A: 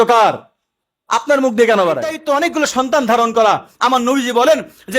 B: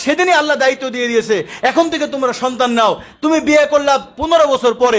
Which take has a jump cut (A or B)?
A